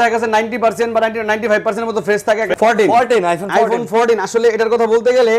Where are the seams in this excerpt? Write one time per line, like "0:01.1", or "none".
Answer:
0:02.5

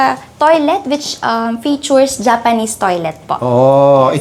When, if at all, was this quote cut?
none

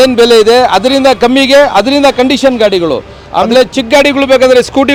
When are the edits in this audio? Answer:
none

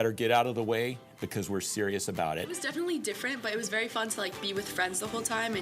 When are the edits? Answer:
0:02.6

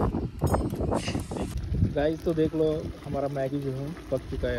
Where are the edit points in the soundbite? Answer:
0:01.6

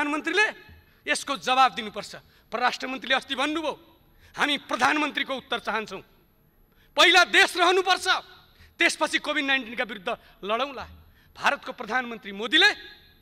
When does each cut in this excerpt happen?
none

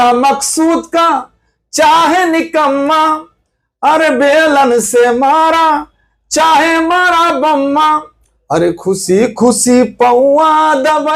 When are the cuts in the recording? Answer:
none

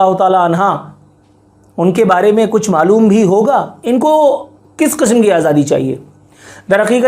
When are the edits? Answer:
0:03.8

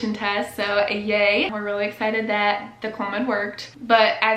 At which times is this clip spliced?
0:01.6

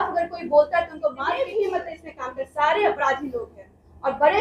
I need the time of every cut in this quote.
0:01.2

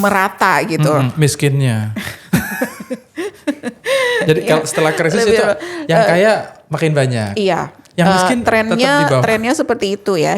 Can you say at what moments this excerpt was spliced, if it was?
none

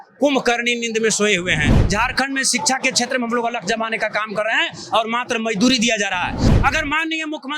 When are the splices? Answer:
0:01.8
0:06.4

